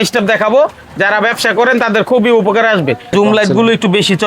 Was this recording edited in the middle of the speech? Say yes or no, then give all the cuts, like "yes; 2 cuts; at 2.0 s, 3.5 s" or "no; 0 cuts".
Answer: yes; 1 cut; at 3.1 s